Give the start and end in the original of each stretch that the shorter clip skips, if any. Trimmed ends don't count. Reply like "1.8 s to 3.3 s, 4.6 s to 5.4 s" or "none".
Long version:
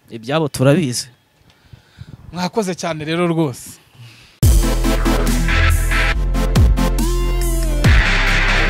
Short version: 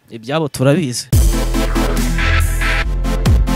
1.0 s to 4.3 s